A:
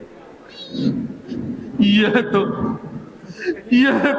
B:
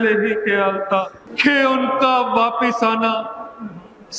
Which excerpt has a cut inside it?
B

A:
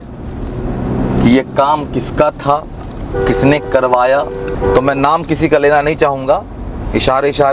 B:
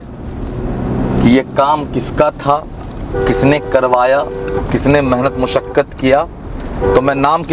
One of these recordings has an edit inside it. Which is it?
A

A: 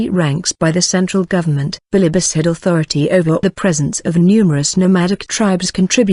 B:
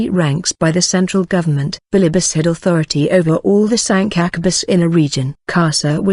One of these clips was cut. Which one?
B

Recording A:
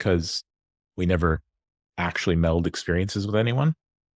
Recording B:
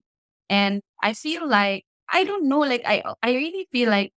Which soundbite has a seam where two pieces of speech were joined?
B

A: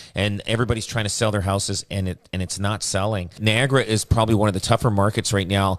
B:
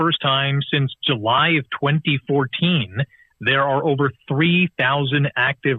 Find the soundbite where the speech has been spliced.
A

